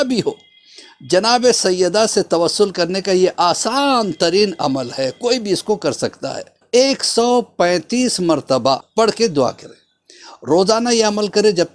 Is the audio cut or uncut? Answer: cut